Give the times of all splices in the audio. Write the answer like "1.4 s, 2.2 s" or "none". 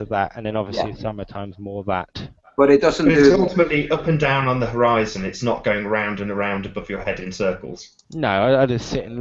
none